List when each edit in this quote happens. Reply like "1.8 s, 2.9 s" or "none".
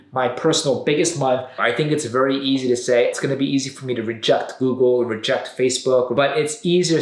1.6 s, 3.1 s, 6.1 s